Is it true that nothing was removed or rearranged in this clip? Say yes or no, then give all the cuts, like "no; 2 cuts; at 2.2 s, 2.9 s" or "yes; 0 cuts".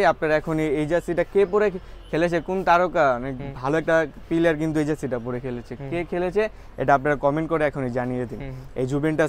yes; 0 cuts